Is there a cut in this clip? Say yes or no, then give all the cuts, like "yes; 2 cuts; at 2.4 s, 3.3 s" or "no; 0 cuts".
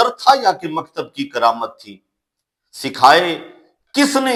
no; 0 cuts